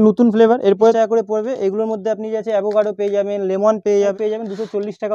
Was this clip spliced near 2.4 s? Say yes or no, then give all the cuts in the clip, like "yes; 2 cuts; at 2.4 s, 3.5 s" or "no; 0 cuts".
no; 2 cuts; at 0.9 s, 4.1 s